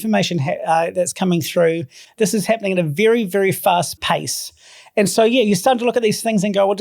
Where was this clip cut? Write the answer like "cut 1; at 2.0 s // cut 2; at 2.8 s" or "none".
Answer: cut 1; at 4.0 s